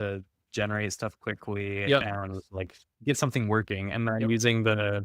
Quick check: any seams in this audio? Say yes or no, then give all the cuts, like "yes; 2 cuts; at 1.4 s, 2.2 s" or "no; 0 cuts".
yes; 1 cut; at 2.8 s